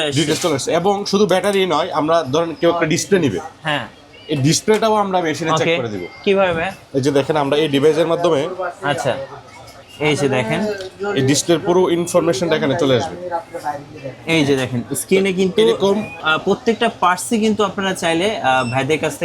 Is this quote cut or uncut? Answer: cut